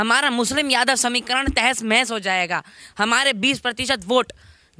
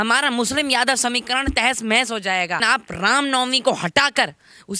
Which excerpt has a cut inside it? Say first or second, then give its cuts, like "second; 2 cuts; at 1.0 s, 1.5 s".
second; 1 cut; at 2.6 s